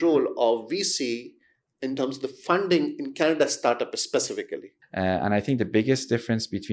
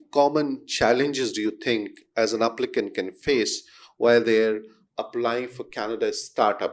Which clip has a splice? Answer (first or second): first